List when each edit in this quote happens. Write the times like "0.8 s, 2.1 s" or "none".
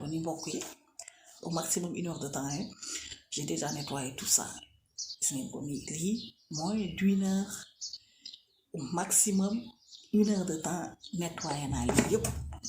1.3 s